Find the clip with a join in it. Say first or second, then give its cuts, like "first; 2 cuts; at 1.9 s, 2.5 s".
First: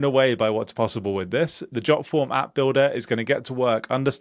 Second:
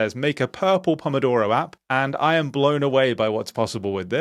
second; 1 cut; at 1.8 s